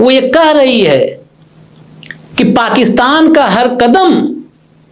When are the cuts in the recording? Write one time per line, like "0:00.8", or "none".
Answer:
none